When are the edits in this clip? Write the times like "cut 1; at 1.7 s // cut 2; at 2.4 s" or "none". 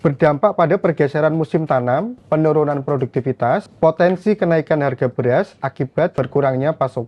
cut 1; at 6.1 s